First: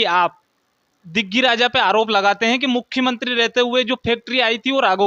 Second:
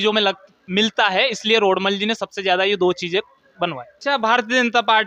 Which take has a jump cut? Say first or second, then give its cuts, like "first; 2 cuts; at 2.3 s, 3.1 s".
second; 1 cut; at 3.9 s